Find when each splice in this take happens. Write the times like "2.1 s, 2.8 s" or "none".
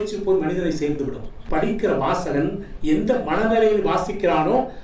1.4 s